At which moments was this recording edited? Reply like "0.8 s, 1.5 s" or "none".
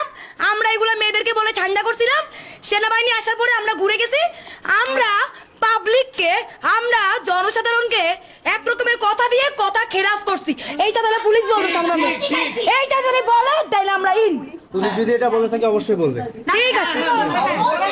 none

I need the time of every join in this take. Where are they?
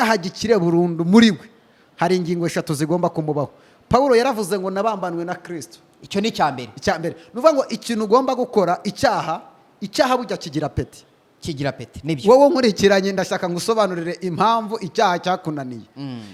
none

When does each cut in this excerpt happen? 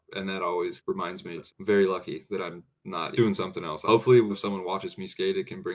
1.4 s, 3.2 s, 4.3 s

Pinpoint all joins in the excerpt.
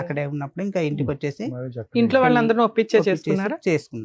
none

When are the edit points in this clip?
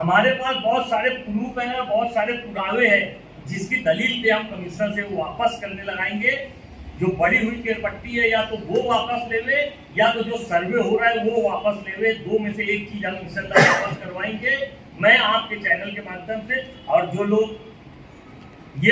none

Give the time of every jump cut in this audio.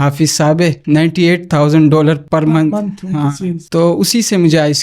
0.8 s, 3.5 s

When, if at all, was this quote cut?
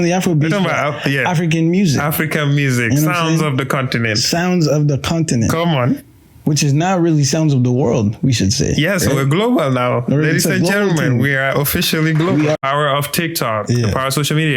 12.6 s

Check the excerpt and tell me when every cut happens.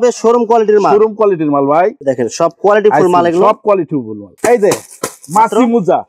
2.0 s, 4.3 s

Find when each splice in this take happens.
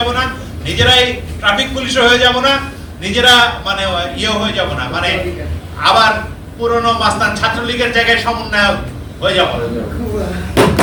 none

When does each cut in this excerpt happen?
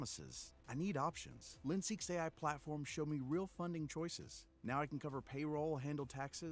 none

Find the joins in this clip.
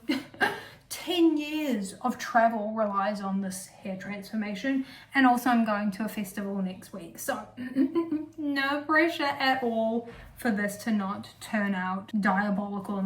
12.0 s

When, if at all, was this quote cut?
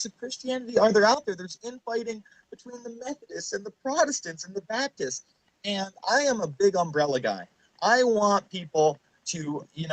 3.5 s

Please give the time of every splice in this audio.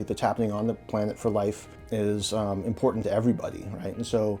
1.7 s

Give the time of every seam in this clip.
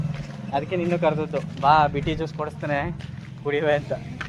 none

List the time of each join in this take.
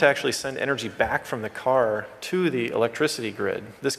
none

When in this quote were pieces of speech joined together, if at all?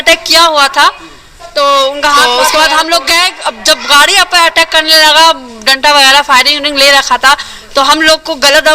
2.2 s

